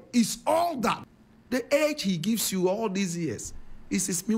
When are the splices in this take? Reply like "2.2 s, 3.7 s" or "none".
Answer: 1.0 s